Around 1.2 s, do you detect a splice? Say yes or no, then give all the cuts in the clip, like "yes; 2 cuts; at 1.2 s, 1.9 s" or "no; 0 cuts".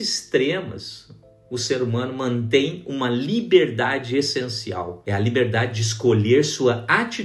no; 1 cut; at 5.0 s